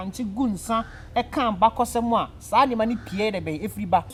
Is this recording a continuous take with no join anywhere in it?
yes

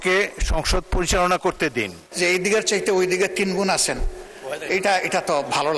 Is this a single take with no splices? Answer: no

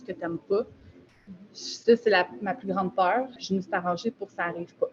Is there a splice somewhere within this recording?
yes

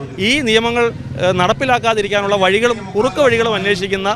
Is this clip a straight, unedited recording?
yes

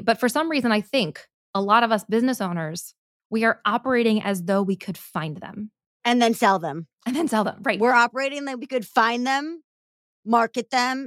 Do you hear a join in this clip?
no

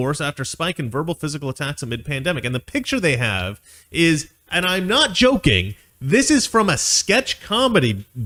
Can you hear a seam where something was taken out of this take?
no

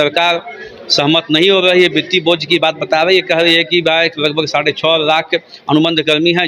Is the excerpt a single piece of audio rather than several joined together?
yes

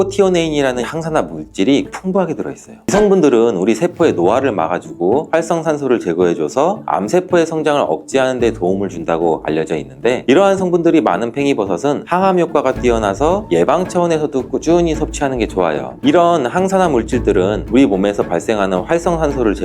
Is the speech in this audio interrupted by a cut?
yes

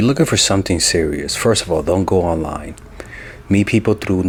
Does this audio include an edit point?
no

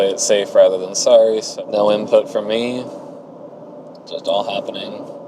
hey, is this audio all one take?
no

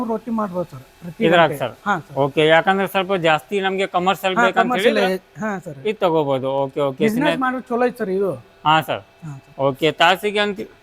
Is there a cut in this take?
no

